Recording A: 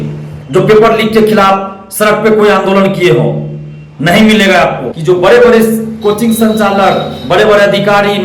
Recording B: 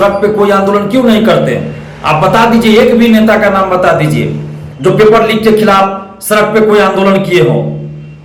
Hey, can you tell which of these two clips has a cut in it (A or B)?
A